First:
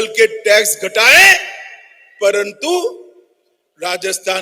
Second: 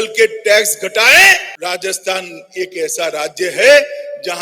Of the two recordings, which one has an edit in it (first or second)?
second